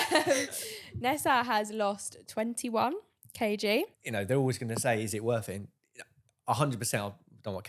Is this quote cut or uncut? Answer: cut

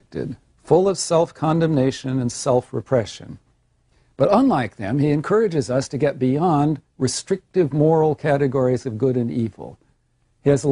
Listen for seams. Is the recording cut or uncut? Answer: cut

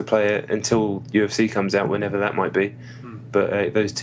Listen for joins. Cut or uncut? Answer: cut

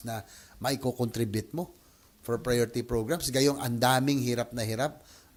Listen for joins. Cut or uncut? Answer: uncut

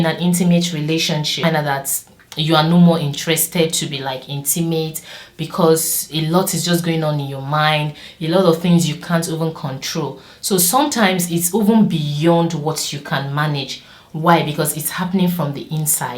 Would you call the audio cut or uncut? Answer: cut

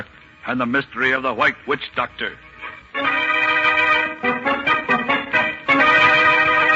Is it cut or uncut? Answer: cut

